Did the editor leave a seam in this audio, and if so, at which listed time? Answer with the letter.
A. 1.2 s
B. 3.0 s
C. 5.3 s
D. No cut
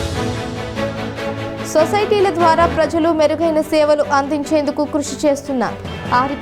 A